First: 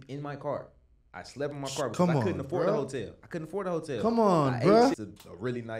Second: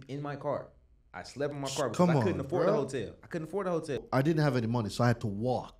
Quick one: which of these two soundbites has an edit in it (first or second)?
second